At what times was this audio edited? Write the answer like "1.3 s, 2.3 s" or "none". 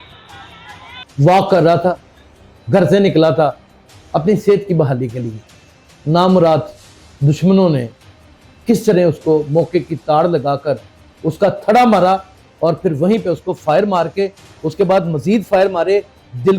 1.1 s